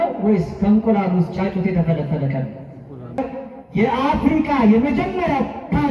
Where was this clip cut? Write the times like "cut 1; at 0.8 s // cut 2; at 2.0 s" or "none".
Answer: cut 1; at 3.2 s